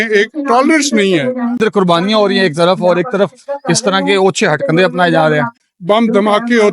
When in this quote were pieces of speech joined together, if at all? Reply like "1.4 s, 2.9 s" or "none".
1.6 s, 5.7 s